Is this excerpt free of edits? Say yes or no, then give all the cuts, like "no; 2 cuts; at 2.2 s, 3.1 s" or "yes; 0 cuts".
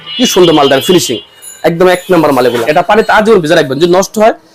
no; 1 cut; at 2.6 s